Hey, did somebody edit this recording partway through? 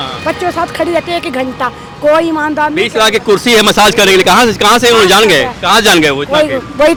no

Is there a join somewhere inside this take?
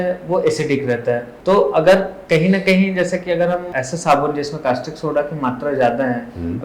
yes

